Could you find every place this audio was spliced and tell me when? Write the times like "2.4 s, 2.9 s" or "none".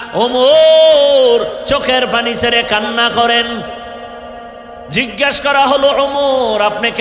4.9 s

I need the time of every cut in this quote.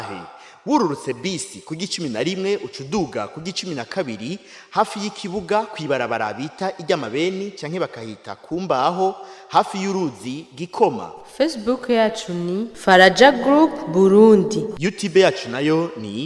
none

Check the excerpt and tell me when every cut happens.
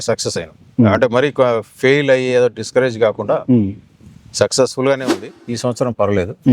5.3 s

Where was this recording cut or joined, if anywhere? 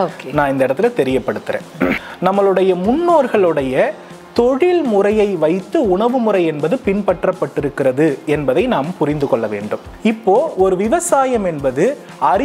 2.1 s, 9.8 s

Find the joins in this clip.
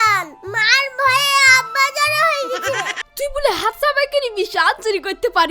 3.0 s

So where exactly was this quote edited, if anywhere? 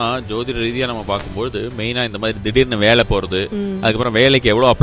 none

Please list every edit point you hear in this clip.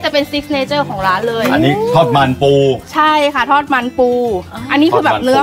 none

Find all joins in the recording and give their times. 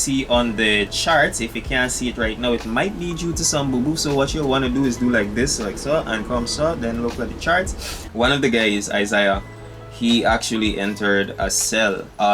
8.0 s

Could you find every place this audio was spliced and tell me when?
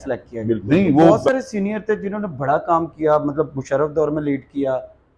1.2 s

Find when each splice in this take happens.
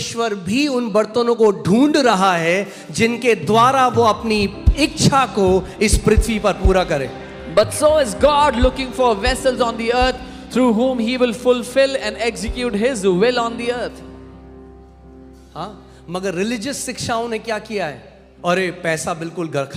none

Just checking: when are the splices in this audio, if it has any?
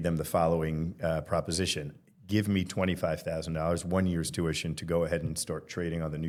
none

